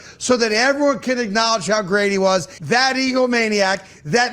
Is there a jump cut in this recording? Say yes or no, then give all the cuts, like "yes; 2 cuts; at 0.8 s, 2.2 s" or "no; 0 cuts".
yes; 1 cut; at 2.5 s